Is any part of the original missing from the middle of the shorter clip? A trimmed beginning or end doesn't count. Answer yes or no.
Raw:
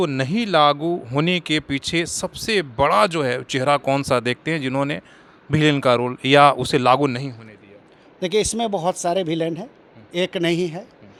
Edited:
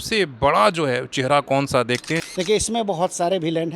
yes